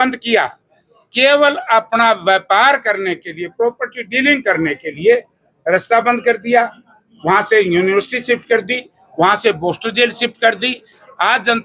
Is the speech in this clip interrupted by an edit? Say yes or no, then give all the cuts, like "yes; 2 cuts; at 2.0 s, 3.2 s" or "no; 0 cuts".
no; 0 cuts